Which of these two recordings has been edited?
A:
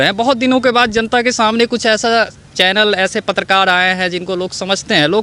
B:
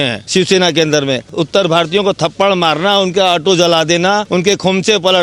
B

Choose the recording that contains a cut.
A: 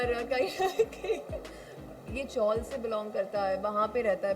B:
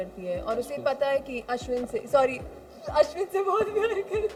A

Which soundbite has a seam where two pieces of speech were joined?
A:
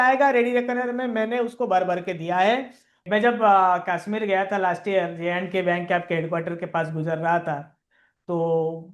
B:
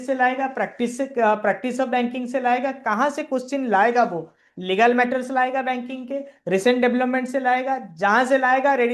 A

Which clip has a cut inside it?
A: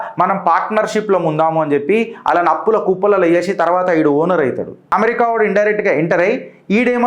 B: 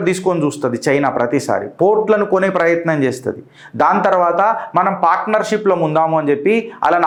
A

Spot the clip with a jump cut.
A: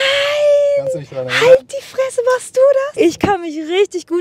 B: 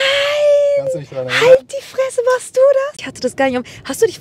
B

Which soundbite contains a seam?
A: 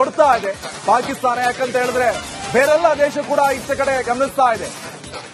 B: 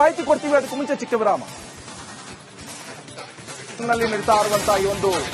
B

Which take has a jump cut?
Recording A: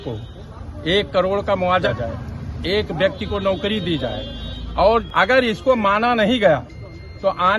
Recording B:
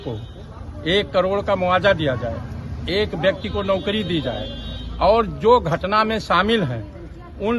A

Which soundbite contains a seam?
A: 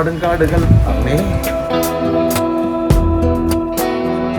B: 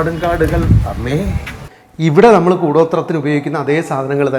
B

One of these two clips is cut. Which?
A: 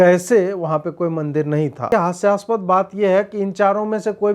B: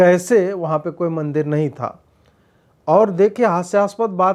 A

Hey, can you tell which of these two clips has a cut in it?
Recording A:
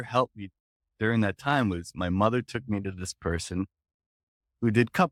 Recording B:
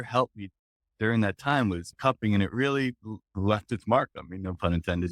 B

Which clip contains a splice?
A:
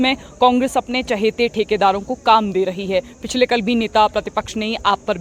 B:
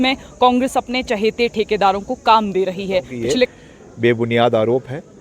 B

